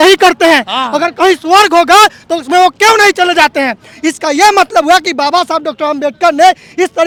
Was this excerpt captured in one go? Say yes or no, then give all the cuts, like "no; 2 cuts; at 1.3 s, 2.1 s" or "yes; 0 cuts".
yes; 0 cuts